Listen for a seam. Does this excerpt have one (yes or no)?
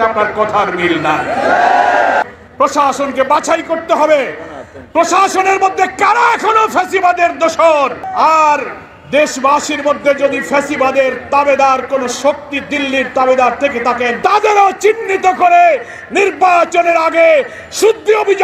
yes